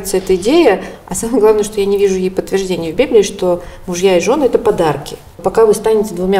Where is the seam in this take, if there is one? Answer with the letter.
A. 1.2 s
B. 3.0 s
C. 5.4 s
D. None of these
C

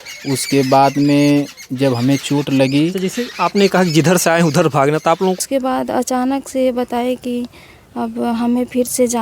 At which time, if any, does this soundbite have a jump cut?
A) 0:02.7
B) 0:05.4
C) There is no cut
B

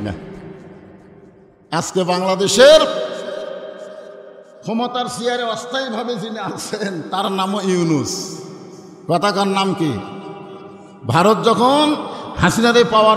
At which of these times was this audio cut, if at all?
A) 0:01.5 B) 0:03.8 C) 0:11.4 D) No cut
A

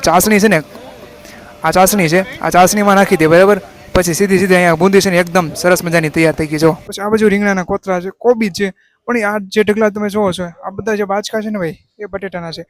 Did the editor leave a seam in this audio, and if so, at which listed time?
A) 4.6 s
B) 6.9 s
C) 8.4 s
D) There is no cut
B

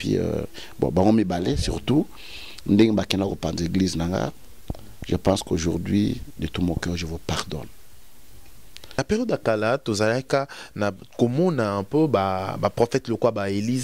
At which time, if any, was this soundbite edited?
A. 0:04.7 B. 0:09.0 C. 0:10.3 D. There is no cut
B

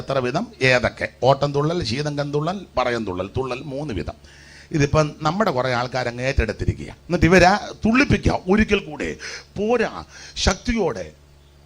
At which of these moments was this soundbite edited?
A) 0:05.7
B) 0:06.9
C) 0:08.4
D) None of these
B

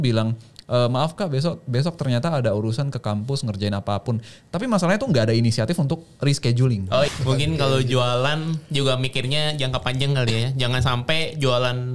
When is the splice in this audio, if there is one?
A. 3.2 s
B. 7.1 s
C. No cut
B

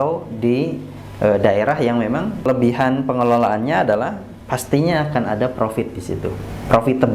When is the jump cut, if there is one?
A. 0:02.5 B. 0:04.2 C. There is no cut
A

